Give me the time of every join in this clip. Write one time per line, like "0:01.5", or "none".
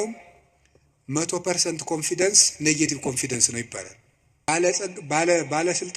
0:04.5